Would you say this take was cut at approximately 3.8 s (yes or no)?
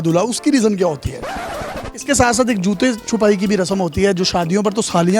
no